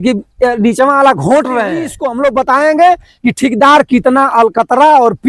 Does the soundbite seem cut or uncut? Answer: cut